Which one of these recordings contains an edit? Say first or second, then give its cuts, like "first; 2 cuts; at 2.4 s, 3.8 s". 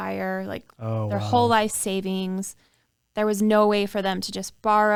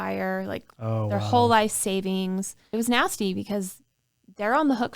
second; 1 cut; at 2.6 s